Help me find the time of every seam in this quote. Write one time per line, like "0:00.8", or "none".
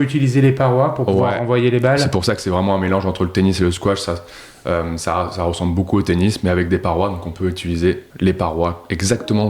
0:08.1